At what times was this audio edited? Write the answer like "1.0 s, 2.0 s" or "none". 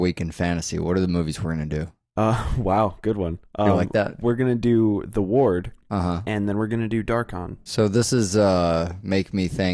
3.9 s